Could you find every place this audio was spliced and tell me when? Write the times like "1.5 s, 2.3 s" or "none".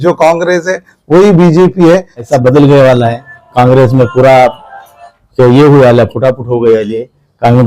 2.3 s